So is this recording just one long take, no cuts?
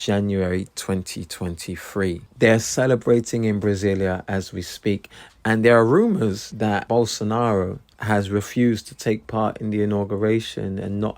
no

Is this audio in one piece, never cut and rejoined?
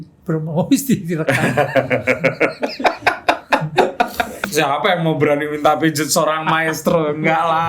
no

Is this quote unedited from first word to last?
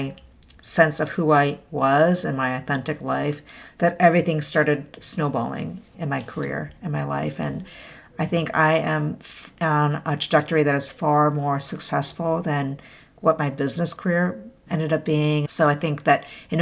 yes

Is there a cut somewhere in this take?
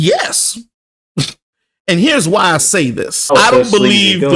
yes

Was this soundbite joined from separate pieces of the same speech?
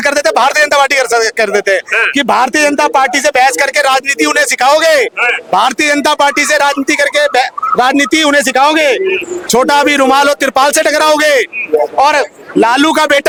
no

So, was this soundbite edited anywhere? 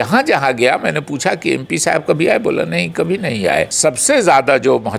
yes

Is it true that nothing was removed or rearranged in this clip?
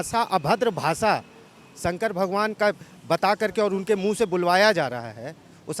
yes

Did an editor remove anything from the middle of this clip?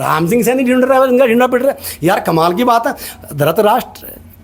no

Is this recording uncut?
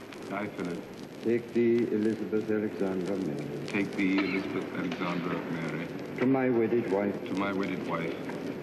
no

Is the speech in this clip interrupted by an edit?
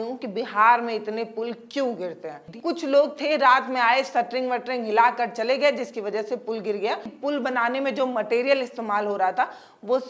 yes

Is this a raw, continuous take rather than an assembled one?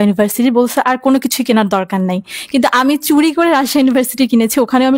yes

